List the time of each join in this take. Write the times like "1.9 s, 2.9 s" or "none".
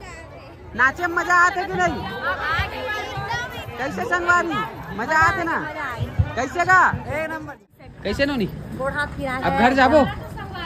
7.6 s